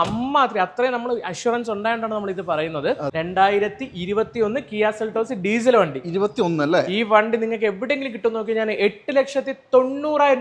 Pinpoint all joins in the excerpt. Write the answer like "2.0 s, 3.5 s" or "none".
3.1 s